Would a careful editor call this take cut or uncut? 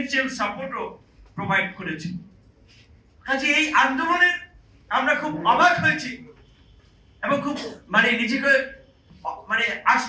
uncut